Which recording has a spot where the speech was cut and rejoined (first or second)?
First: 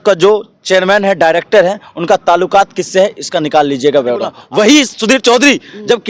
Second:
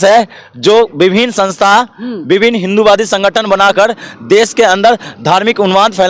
first